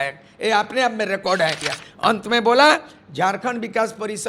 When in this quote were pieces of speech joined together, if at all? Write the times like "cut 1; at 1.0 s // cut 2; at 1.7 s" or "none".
cut 1; at 1.7 s